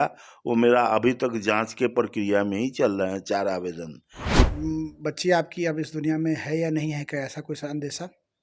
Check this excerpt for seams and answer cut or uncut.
cut